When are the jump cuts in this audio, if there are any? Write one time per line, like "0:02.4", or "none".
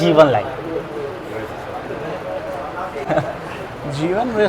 none